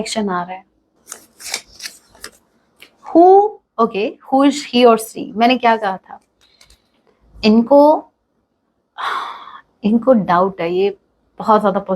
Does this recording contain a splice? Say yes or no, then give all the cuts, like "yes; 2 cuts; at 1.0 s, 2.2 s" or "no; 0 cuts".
yes; 1 cut; at 0.9 s